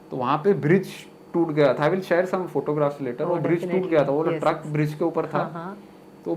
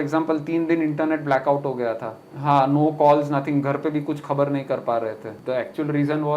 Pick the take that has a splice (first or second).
second